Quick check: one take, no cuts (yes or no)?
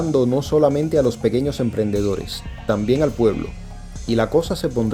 yes